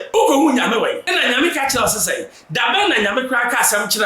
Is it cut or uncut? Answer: cut